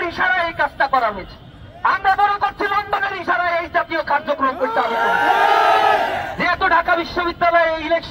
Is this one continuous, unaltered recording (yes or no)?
yes